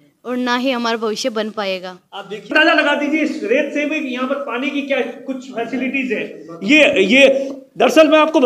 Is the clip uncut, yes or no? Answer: no